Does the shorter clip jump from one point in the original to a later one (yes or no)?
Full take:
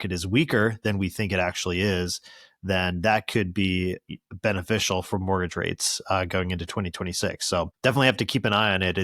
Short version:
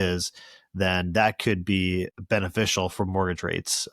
yes